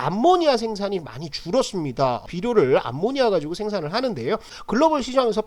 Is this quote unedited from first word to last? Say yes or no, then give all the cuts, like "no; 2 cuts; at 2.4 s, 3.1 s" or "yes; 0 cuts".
no; 1 cut; at 4.5 s